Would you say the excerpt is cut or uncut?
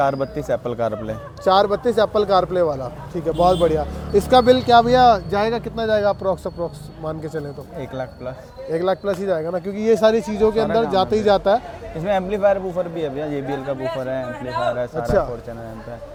uncut